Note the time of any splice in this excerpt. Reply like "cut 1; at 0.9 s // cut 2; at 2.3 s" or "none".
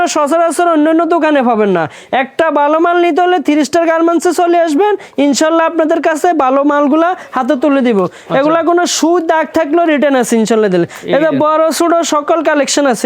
none